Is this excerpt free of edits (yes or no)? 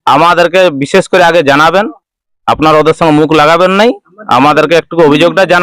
no